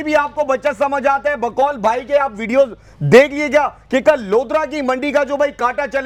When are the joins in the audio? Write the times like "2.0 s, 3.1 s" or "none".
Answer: none